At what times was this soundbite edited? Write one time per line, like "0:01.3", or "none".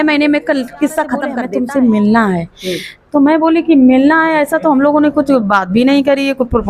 0:01.4